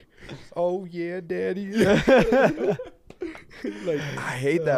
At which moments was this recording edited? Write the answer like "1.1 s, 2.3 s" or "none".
none